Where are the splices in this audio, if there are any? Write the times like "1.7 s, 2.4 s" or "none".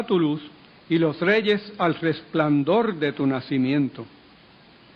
3.7 s